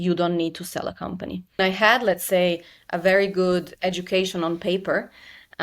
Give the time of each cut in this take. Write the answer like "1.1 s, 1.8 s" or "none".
1.6 s